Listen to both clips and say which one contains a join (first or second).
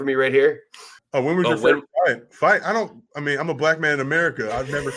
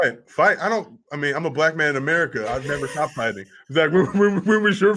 first